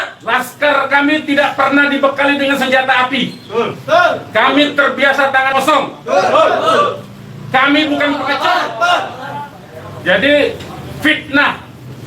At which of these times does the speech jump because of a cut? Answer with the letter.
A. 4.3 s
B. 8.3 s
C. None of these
B